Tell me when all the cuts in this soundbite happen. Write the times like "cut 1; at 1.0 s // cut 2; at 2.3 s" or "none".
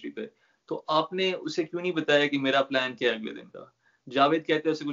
none